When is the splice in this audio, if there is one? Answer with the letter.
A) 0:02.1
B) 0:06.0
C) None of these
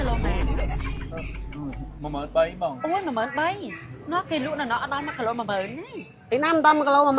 C